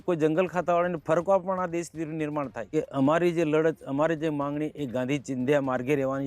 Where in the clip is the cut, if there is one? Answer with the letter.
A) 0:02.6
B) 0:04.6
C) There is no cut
A